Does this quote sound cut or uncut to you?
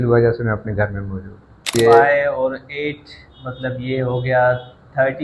cut